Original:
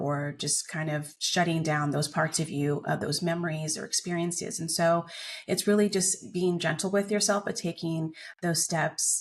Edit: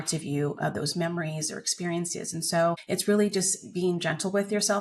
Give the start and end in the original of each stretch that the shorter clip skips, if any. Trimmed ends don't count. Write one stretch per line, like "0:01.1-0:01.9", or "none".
0:05.1-0:05.4